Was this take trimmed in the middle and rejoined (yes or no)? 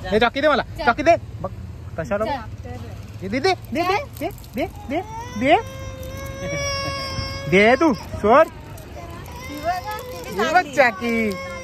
no